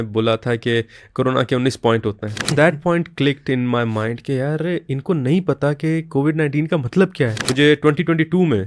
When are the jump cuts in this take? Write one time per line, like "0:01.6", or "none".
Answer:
0:02.5
0:07.4